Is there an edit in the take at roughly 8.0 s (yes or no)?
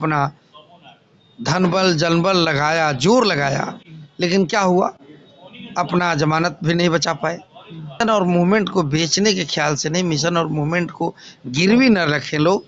yes